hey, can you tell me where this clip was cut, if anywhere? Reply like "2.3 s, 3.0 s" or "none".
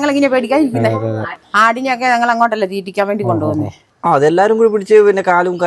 1.4 s, 3.8 s

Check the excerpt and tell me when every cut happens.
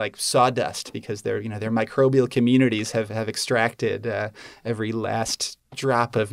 none

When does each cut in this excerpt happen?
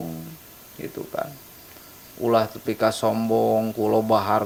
none

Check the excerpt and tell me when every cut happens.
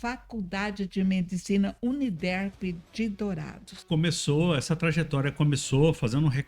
3.8 s

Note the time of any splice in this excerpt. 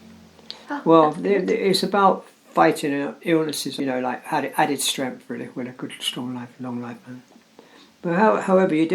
3.7 s

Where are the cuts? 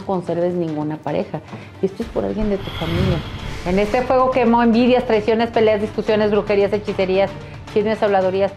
3.2 s

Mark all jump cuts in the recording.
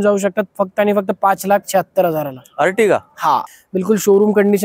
3.5 s

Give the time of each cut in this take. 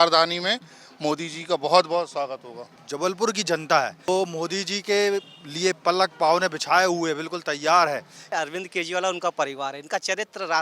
2.8 s, 4.1 s, 8.3 s

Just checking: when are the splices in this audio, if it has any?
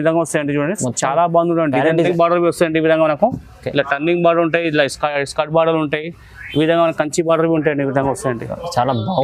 2.1 s

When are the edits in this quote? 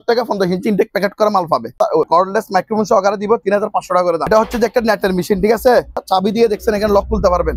2.0 s, 4.3 s, 6.0 s

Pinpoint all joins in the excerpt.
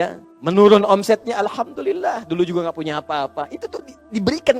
none

